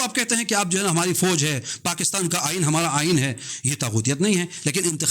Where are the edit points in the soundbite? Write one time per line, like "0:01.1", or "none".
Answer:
0:03.5